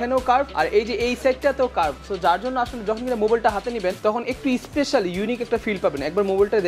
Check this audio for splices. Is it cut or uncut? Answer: uncut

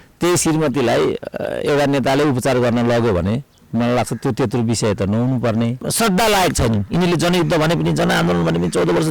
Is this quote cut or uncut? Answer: cut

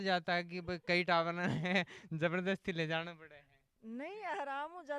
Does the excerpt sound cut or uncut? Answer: uncut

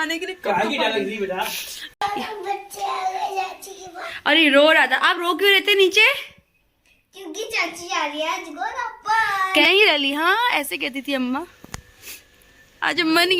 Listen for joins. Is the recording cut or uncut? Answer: cut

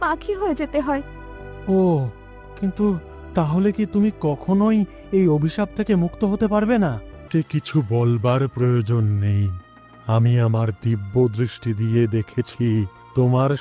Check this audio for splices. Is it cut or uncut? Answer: cut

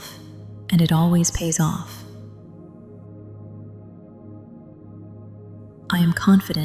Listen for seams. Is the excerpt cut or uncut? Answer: cut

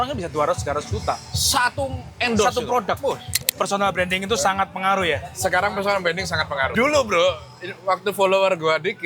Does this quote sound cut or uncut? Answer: cut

